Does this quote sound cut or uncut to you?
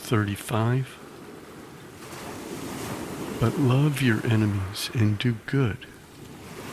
uncut